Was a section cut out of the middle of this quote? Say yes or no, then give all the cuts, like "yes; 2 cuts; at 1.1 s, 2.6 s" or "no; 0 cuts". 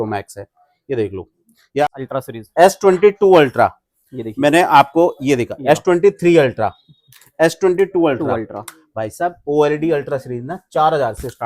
yes; 1 cut; at 1.8 s